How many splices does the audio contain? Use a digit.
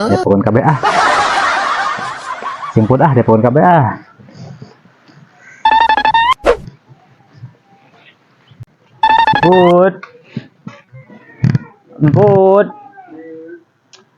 1